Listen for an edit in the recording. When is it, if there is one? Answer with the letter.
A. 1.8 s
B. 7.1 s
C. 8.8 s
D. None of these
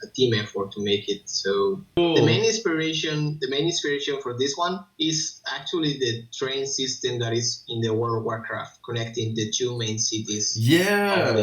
A